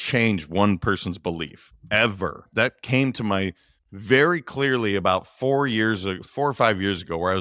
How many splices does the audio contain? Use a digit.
1